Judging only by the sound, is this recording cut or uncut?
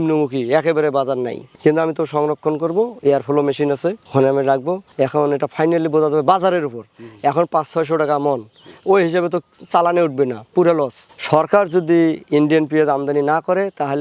uncut